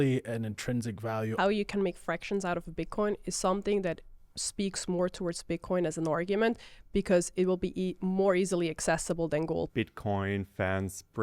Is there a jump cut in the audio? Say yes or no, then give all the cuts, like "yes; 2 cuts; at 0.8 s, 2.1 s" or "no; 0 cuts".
yes; 2 cuts; at 1.3 s, 9.7 s